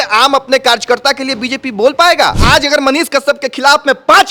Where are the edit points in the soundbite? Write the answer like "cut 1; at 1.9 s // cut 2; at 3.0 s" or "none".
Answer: cut 1; at 2.4 s